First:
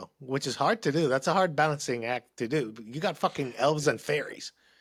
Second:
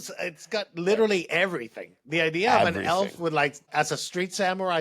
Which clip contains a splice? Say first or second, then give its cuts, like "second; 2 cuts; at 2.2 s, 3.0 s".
second; 1 cut; at 3.7 s